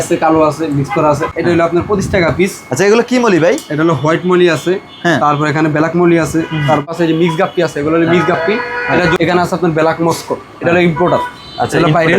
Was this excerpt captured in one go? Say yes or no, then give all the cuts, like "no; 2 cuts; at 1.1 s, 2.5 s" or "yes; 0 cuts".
no; 3 cuts; at 1.3 s, 6.9 s, 9.2 s